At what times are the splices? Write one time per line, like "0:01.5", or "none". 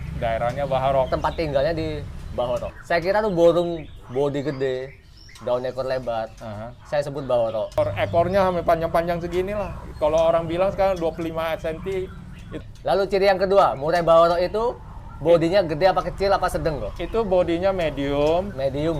0:02.7
0:07.8
0:12.5